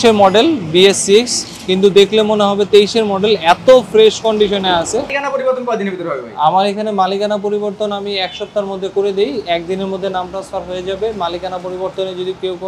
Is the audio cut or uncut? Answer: cut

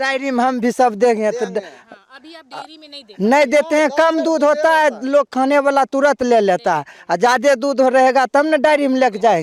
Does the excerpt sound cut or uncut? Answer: uncut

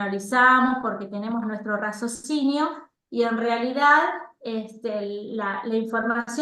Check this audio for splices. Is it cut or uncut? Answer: uncut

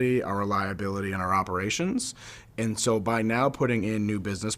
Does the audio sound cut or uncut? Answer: uncut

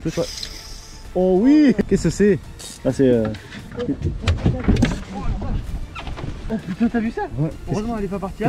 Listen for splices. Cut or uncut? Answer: cut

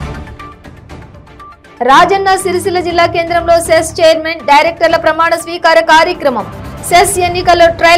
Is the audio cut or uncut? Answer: cut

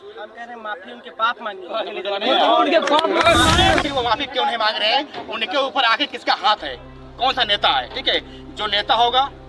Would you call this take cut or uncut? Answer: cut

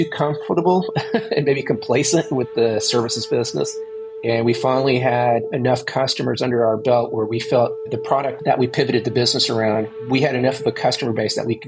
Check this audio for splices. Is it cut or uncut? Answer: cut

